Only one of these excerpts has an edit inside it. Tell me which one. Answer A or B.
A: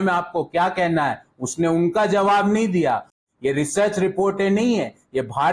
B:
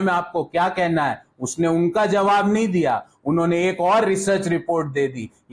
A